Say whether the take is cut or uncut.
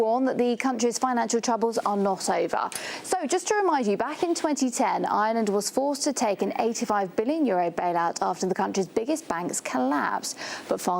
cut